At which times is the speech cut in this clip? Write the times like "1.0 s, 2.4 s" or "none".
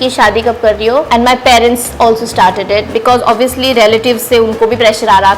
none